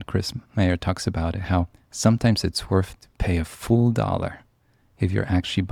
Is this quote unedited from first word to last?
yes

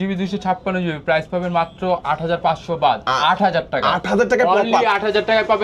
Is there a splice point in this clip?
no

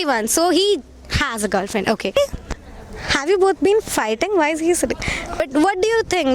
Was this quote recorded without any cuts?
no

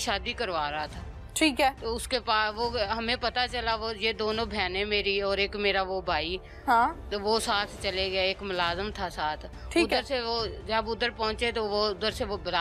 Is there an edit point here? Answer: no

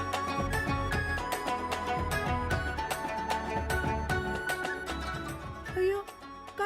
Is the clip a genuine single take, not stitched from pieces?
no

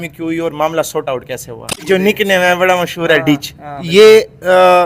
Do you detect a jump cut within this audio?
yes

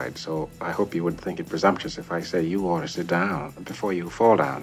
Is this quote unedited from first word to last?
yes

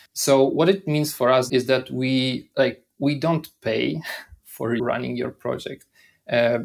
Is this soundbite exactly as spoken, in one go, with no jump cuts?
no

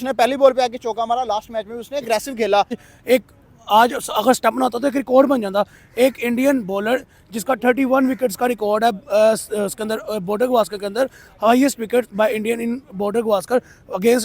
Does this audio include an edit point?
yes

